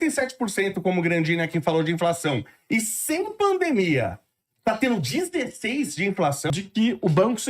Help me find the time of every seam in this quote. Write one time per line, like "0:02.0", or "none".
0:06.4